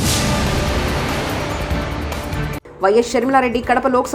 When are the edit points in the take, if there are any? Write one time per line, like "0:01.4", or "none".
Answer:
0:02.6

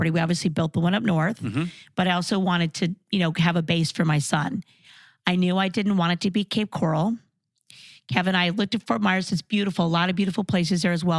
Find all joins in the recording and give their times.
none

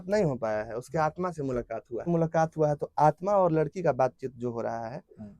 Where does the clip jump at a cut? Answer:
0:02.0

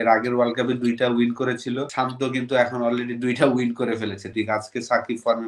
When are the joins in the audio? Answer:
0:01.9
0:04.2

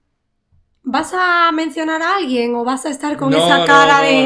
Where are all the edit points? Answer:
none

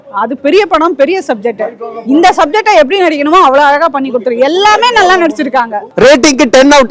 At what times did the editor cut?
0:05.8

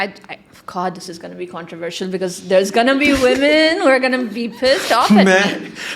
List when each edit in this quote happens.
none

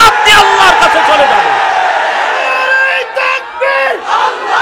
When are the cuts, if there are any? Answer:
none

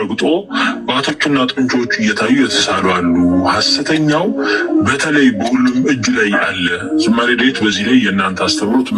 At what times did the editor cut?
none

